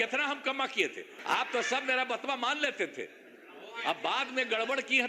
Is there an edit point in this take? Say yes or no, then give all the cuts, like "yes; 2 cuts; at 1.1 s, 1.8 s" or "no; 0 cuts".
yes; 1 cut; at 1.1 s